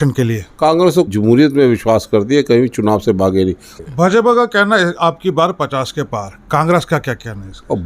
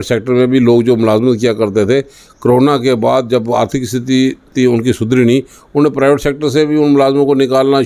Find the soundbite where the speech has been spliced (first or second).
first